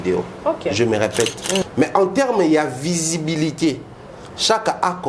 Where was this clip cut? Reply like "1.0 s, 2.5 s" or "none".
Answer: 1.6 s